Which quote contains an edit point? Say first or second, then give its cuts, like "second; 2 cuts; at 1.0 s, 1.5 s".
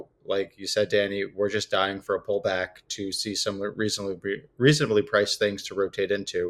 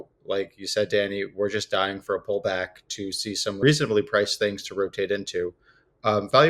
second; 1 cut; at 3.6 s